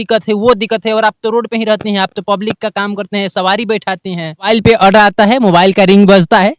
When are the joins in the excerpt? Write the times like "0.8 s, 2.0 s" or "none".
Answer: 4.5 s